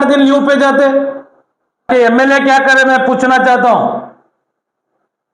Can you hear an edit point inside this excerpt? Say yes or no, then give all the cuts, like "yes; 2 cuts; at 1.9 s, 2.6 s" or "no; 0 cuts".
yes; 1 cut; at 1.9 s